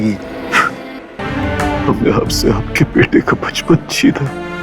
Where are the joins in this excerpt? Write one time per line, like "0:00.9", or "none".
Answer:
0:01.2